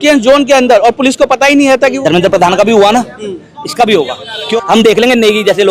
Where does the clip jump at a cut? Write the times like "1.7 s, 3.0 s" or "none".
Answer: 2.0 s, 4.5 s